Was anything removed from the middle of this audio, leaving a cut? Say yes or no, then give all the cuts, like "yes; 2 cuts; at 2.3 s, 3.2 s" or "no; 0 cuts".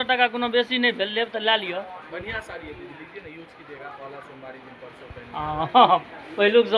no; 0 cuts